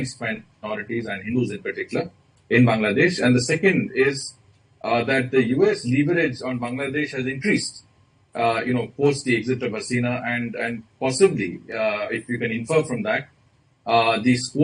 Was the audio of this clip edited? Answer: no; 0 cuts

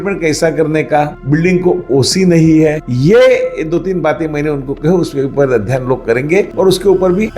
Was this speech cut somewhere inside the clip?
yes; 1 cut; at 2.8 s

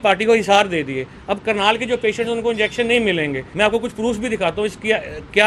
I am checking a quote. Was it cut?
yes; 1 cut; at 3.4 s

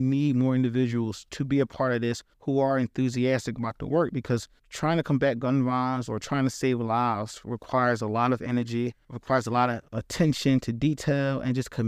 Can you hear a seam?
no; 0 cuts

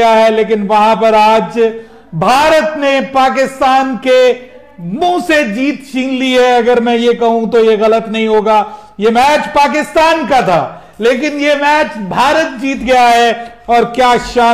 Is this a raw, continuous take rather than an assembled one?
yes; 0 cuts

